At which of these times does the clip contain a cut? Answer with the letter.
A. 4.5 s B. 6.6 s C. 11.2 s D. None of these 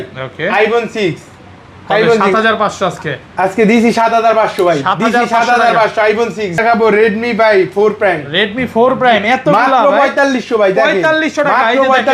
B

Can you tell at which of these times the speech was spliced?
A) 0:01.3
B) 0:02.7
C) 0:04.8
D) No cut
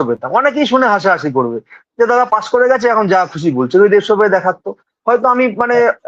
D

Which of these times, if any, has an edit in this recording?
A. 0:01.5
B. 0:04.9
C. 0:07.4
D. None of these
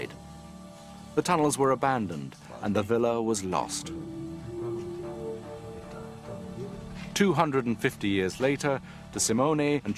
A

